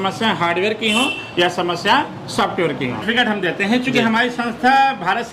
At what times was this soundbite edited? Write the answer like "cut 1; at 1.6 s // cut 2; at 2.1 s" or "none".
cut 1; at 3.0 s